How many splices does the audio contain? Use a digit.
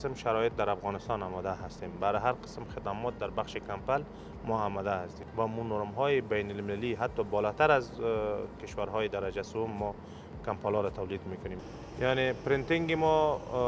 2